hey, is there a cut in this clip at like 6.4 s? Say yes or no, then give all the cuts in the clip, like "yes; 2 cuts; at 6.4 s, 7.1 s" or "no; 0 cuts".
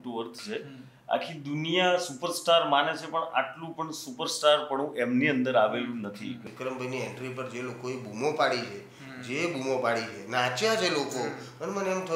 yes; 1 cut; at 6.4 s